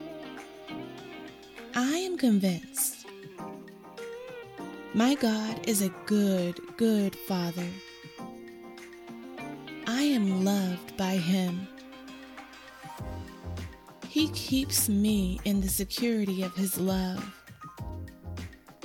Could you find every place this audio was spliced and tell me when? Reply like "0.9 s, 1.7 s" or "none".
none